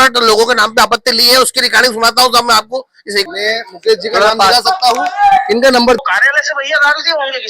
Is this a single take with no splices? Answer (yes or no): no